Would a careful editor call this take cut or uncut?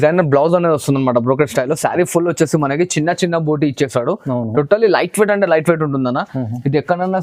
uncut